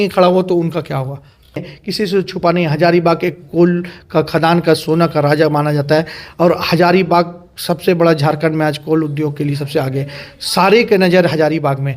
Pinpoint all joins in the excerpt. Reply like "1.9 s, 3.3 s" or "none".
1.8 s